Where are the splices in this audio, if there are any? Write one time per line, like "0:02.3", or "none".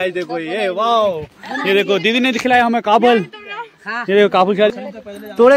none